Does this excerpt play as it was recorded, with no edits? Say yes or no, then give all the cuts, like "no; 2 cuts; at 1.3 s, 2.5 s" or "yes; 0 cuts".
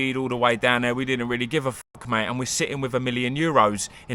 yes; 0 cuts